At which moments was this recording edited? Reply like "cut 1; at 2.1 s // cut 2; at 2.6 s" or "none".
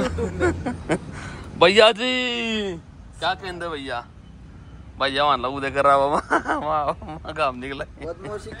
none